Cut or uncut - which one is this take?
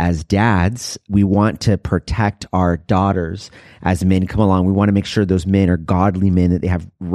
cut